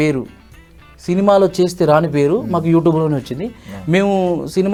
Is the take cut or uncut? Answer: uncut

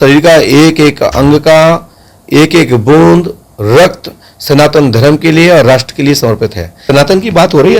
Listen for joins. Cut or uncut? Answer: cut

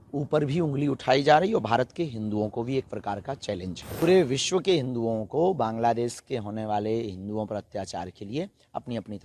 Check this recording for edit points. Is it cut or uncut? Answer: cut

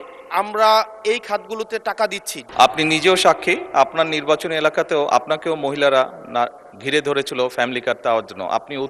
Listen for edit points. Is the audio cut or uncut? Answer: cut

